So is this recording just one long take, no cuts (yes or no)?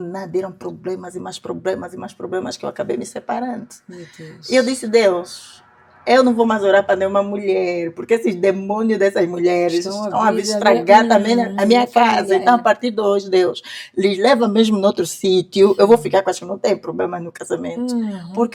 yes